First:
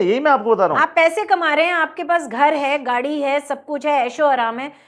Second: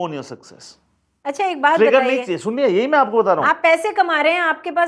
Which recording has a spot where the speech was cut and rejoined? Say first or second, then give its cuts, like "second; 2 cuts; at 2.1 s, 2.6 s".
second; 1 cut; at 1.2 s